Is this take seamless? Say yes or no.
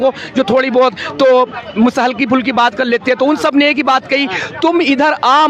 yes